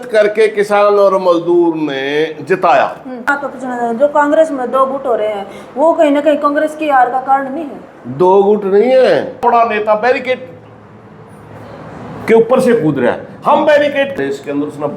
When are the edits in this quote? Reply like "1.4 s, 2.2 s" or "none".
3.3 s, 9.4 s, 14.1 s